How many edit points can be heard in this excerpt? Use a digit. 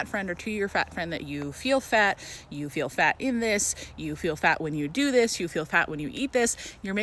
0